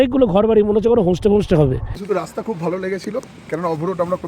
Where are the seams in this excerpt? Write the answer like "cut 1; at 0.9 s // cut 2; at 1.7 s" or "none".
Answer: cut 1; at 1.9 s